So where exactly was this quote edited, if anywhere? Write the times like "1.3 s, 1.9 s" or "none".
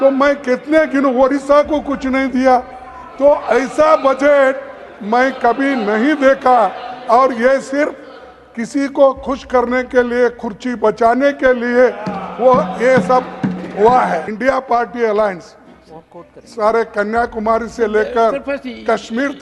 14.3 s